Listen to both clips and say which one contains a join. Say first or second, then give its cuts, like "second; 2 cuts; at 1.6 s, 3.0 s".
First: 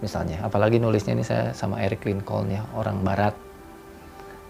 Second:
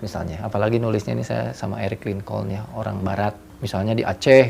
second; 1 cut; at 3.5 s